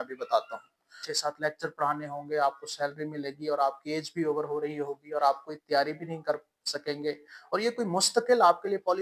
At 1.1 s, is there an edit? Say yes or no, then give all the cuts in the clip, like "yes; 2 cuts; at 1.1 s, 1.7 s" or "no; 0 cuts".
yes; 1 cut; at 1.1 s